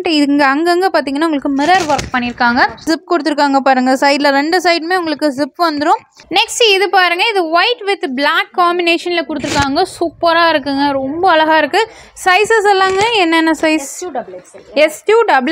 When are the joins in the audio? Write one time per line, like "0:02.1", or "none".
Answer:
0:02.9
0:06.2
0:12.0